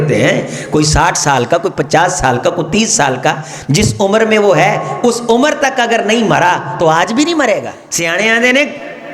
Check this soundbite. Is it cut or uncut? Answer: cut